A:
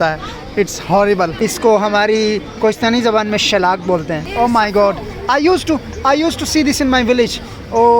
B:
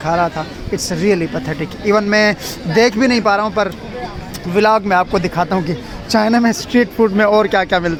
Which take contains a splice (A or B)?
A